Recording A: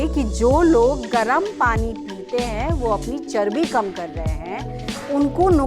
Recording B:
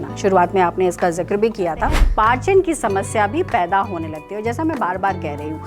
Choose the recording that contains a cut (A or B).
B